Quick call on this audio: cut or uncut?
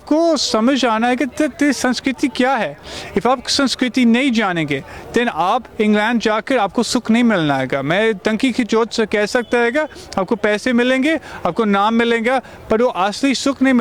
uncut